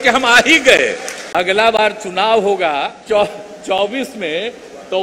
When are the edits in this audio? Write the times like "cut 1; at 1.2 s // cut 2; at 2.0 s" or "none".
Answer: cut 1; at 1.2 s // cut 2; at 3.0 s